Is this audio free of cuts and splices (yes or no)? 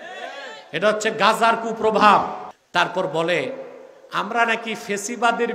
no